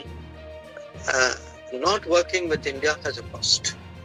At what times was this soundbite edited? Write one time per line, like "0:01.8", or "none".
none